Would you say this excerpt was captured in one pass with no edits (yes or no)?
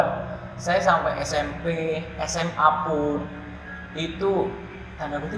yes